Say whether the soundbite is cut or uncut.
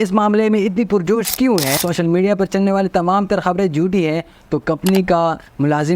cut